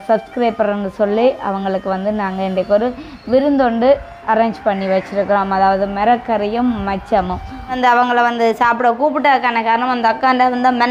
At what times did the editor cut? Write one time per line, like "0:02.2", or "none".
0:07.7